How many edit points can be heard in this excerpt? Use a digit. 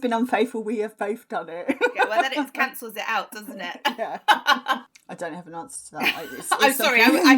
1